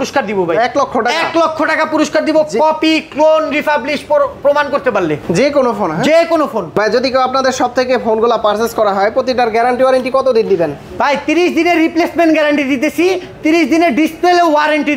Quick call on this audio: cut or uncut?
uncut